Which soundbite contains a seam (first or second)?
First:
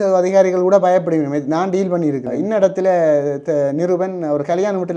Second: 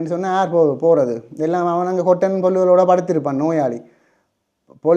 first